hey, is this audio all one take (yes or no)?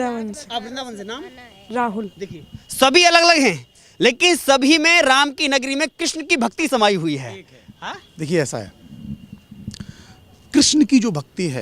yes